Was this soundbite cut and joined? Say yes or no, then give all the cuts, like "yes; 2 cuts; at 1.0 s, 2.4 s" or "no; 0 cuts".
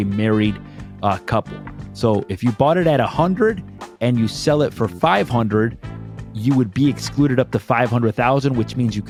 no; 0 cuts